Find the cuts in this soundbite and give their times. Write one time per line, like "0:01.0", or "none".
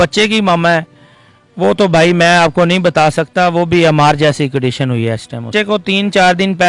0:05.5